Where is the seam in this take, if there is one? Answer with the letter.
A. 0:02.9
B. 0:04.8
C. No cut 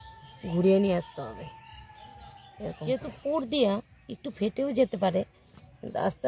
A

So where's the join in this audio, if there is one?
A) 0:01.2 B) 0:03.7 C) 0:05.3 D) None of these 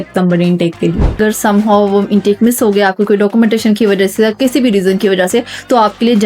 A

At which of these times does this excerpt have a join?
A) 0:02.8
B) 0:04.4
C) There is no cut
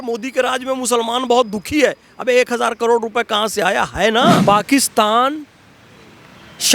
B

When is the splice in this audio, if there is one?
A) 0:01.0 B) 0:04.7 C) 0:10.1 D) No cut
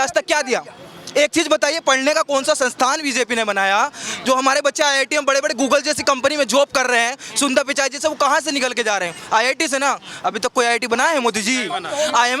D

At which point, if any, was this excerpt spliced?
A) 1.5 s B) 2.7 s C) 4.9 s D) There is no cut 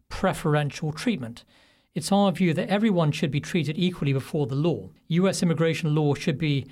C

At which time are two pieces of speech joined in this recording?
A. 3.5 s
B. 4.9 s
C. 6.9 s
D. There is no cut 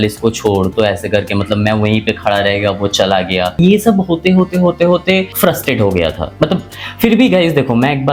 D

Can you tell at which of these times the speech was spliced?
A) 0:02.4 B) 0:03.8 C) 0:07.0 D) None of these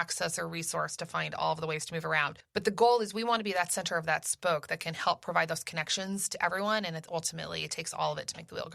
A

